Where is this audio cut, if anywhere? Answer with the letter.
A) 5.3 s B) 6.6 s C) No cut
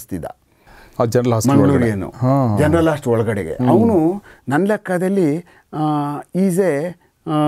C